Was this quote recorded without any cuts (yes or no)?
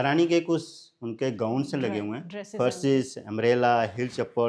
yes